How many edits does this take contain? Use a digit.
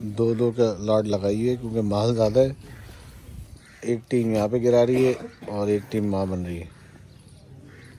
0